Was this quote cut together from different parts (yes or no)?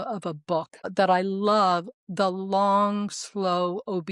yes